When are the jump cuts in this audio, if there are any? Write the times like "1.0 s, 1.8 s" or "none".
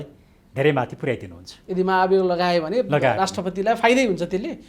none